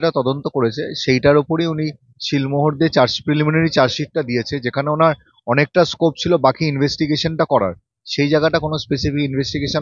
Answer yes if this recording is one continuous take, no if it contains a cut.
yes